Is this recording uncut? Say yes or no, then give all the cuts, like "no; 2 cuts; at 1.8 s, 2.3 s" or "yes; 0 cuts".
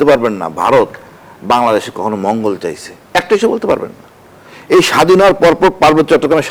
yes; 0 cuts